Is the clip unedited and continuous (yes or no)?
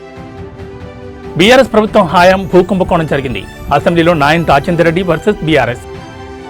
no